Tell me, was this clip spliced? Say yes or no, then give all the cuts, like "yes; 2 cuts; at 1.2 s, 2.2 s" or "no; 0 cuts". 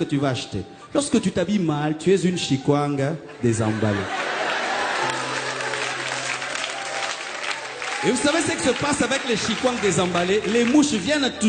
no; 0 cuts